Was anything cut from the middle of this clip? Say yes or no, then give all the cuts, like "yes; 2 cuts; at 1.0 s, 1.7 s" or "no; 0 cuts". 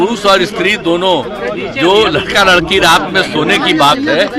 no; 0 cuts